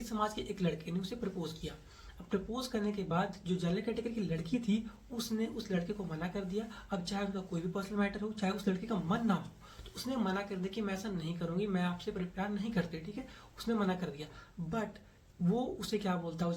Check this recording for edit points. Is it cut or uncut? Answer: cut